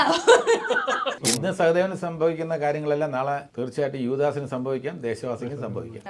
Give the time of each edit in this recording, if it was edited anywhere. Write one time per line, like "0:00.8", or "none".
0:01.2
0:03.5